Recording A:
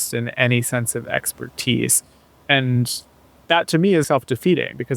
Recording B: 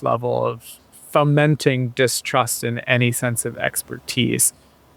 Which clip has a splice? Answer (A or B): A